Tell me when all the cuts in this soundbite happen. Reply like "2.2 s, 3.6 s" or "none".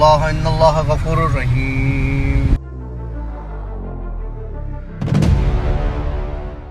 none